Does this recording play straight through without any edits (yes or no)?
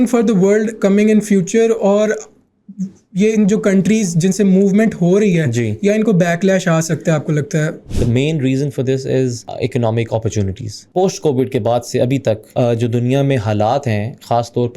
no